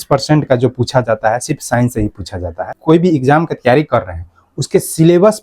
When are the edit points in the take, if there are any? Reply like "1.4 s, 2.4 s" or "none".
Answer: 2.7 s

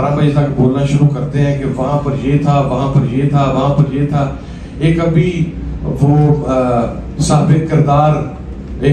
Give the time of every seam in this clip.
none

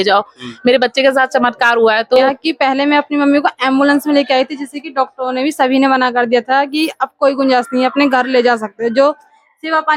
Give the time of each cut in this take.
2.3 s

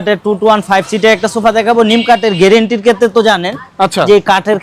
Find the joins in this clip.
none

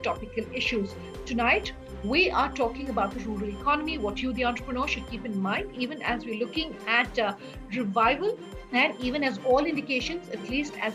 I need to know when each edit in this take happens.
8.5 s

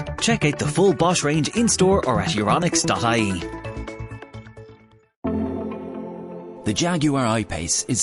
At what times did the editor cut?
5.2 s

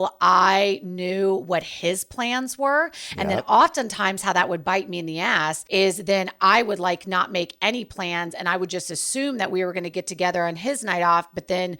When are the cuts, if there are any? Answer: 5.6 s

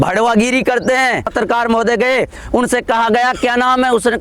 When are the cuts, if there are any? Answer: 1.3 s

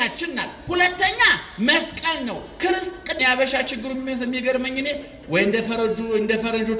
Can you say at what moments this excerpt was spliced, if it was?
3.2 s

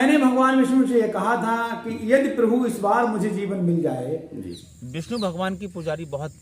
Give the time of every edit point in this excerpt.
4.6 s

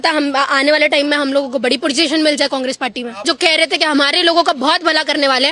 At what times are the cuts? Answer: 3.2 s

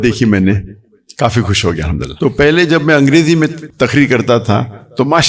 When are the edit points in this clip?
2.1 s, 3.6 s

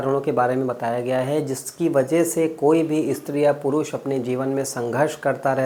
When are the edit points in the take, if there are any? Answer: none

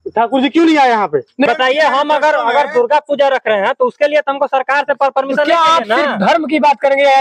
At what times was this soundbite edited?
1.5 s

